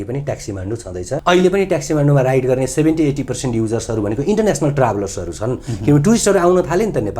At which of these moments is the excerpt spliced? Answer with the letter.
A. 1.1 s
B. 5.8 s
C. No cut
A